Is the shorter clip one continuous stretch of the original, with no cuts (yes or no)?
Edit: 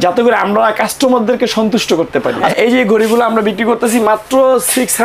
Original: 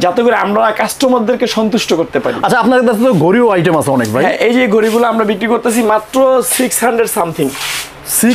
no